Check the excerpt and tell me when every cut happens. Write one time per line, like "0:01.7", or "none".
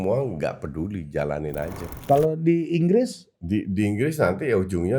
0:01.9